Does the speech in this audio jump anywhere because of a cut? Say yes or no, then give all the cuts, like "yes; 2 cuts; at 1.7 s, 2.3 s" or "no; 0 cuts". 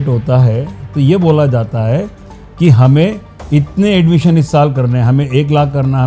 no; 0 cuts